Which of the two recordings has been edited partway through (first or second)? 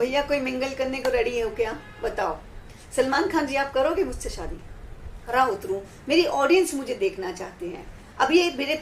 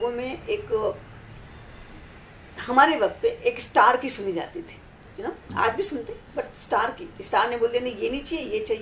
first